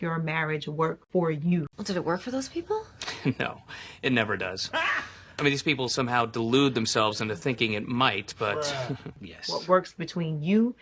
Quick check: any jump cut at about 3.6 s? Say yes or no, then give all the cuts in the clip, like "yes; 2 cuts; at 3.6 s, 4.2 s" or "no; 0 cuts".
no; 1 cut; at 9.2 s